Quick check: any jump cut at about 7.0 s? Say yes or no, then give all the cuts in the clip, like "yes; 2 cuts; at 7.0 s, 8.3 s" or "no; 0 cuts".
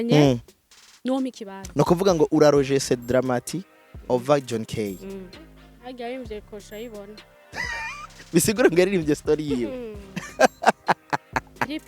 no; 1 cut; at 5.3 s